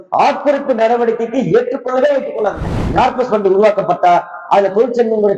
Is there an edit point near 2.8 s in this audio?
yes; 1 cut; at 2.8 s

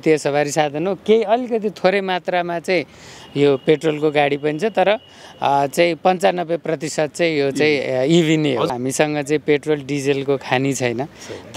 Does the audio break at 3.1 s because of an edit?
no; 1 cut; at 8.7 s

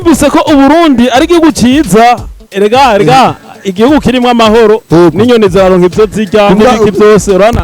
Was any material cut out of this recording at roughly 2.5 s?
yes; 1 cut; at 2.5 s

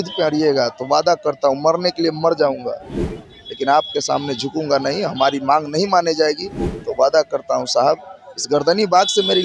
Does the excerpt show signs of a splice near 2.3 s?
no; 0 cuts

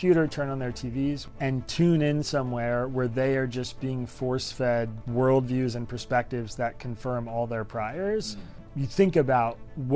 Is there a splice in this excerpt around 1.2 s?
yes; 3 cuts; at 1.2 s, 5.0 s, 8.6 s

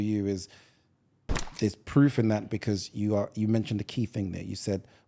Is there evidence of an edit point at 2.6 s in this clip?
no; 1 cut; at 1.4 s

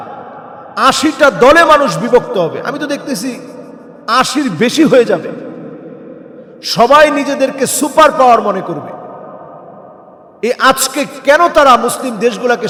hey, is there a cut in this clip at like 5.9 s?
no; 0 cuts

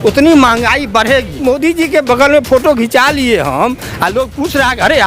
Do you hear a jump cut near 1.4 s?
yes; 1 cut; at 1.4 s

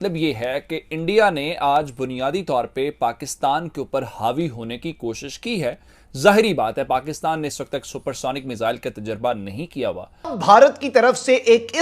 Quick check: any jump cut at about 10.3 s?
yes; 1 cut; at 10.3 s

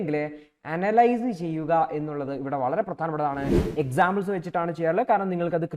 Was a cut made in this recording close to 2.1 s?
no; 1 cut; at 3.6 s

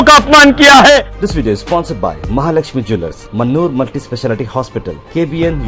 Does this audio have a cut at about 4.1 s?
no; 1 cut; at 1.1 s

